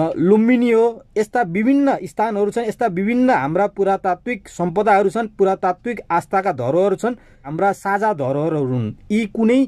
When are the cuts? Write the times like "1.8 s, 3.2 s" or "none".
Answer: 7.5 s